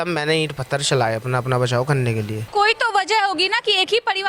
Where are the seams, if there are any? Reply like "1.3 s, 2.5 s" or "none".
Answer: 2.4 s